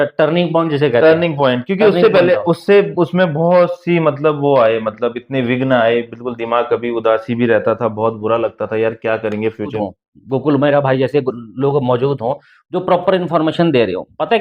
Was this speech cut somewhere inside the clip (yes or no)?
yes